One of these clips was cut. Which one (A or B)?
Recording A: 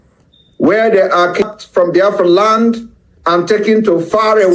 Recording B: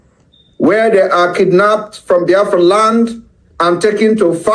A